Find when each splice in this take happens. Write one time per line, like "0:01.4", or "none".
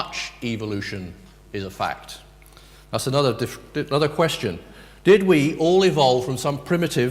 0:03.9